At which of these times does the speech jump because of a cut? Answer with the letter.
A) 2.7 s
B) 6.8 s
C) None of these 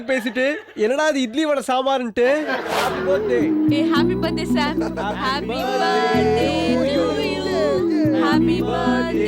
A